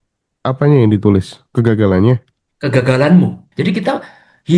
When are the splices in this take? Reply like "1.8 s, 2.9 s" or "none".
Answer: 3.5 s